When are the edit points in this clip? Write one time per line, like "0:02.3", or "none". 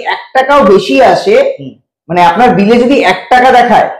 none